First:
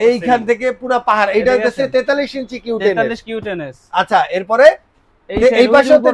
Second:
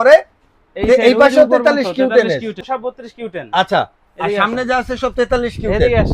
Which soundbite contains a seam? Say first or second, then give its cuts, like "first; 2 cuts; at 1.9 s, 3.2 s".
second; 1 cut; at 2.6 s